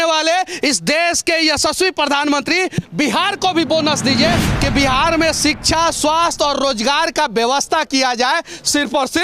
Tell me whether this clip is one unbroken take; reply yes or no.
no